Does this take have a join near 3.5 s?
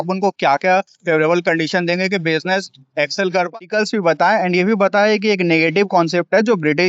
yes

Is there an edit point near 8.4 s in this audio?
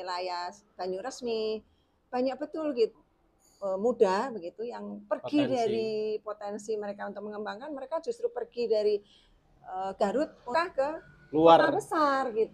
no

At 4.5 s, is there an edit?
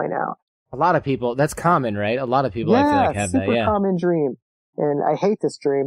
yes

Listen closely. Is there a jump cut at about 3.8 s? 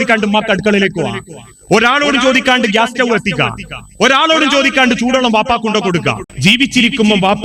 no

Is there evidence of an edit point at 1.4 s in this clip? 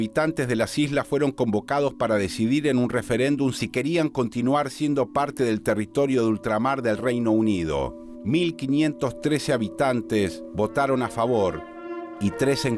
yes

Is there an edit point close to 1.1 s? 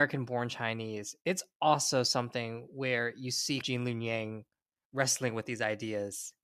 no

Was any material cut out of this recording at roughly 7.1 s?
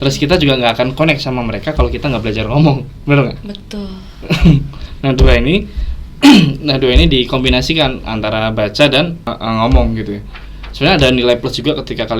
no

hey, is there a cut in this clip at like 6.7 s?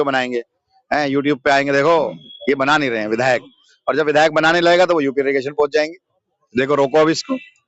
no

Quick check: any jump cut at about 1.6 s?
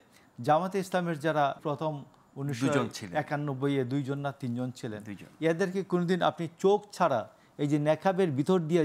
yes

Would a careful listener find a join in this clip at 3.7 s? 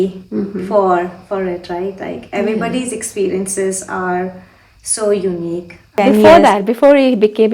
no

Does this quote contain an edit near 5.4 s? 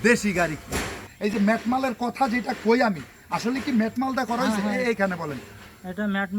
no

